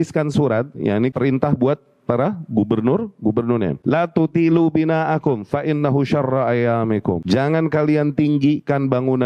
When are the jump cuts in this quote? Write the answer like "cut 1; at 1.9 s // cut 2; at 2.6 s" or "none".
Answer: cut 1; at 1.1 s // cut 2; at 3.8 s // cut 3; at 7.2 s